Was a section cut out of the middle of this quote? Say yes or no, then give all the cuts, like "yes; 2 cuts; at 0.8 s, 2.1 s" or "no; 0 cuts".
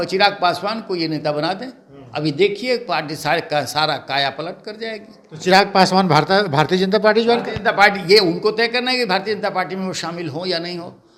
no; 0 cuts